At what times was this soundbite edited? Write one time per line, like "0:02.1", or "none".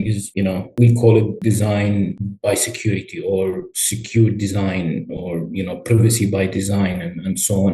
none

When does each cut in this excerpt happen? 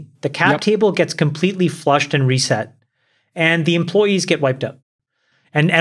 0:04.8

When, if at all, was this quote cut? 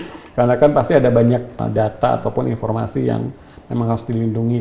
0:01.6

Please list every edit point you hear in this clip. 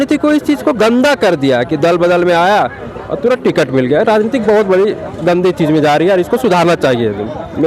none

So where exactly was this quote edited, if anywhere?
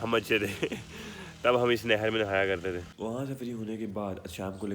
0:02.9

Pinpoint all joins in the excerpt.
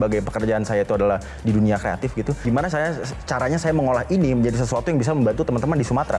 0:02.4

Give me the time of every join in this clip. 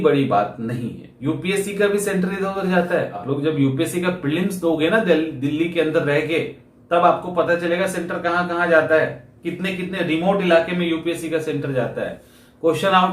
0:01.1
0:03.2

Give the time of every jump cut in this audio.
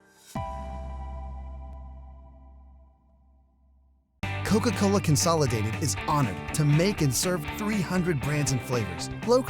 0:04.0

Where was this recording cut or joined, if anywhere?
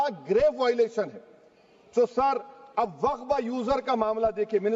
none

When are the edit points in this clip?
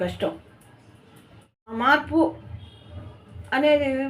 0:01.7

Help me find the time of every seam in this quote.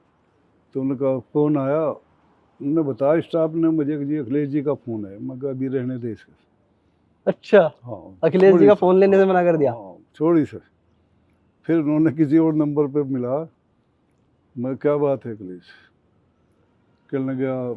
none

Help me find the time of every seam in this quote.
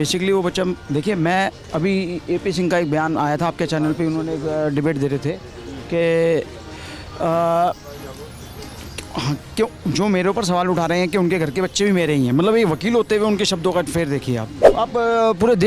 0:14.6

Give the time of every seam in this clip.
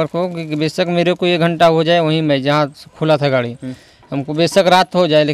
none

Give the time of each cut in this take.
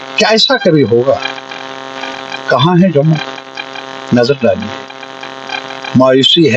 0:02.1

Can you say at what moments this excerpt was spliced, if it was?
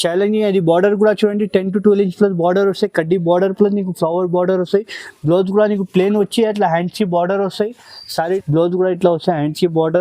0:08.4

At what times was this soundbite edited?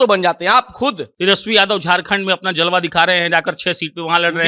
0:01.1

